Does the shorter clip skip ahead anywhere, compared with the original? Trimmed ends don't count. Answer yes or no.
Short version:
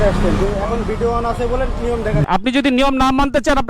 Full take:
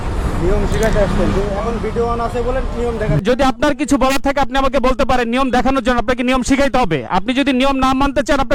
yes